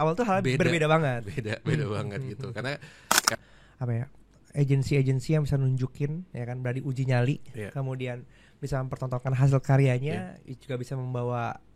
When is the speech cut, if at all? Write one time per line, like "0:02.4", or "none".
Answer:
0:03.3